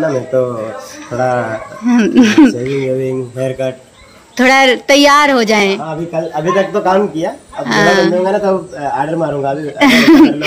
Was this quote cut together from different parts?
no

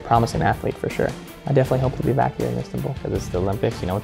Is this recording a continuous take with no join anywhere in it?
no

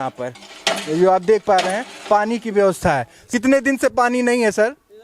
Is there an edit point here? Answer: no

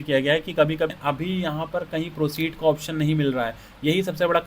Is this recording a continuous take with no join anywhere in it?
no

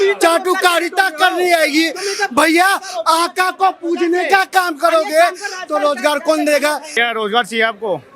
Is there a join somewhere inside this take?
yes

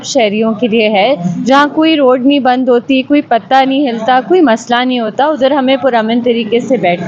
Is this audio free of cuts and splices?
yes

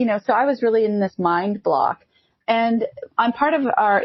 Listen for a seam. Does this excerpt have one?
no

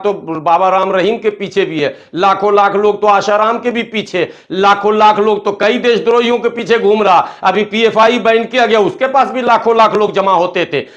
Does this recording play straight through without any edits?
yes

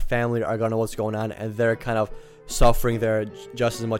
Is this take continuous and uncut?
yes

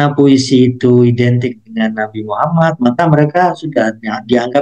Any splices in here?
no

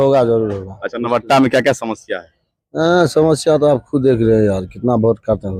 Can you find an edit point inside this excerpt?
no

